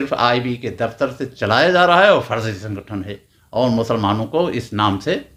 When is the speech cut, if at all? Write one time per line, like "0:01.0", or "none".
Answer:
none